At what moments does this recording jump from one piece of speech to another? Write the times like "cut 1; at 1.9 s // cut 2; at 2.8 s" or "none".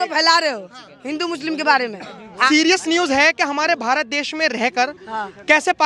cut 1; at 2.4 s